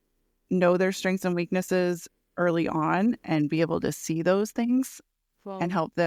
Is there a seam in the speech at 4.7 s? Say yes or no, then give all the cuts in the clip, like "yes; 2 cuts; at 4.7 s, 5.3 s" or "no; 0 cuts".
no; 0 cuts